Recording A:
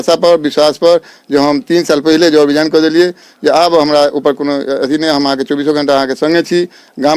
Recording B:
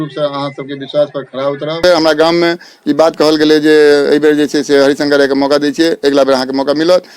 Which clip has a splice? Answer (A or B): B